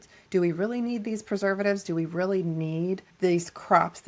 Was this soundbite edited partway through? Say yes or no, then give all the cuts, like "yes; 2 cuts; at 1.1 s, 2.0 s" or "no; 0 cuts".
yes; 1 cut; at 3.1 s